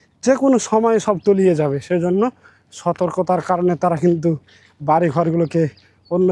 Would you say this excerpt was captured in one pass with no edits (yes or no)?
yes